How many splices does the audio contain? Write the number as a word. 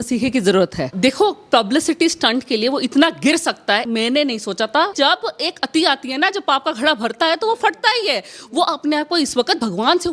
three